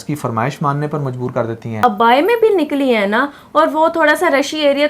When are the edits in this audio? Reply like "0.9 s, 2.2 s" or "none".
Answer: 1.8 s